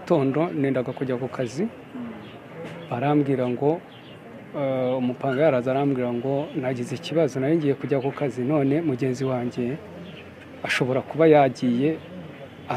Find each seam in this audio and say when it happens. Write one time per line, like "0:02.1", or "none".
none